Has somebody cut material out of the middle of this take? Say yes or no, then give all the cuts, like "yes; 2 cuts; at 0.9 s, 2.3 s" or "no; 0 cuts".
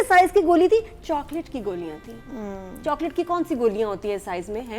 no; 0 cuts